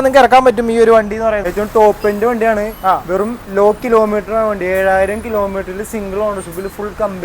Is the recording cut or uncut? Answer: cut